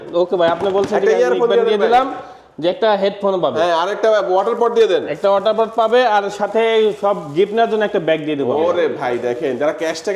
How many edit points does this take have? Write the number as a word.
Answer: zero